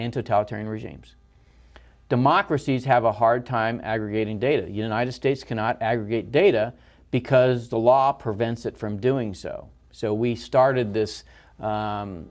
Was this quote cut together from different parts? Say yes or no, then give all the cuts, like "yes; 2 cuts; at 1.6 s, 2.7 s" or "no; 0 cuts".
yes; 1 cut; at 1.0 s